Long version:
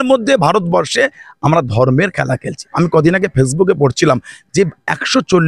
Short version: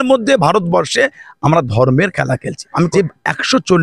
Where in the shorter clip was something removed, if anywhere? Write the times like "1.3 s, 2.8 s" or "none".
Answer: 2.9 s